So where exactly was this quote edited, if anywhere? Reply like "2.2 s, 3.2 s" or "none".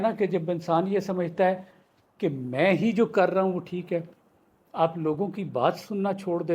none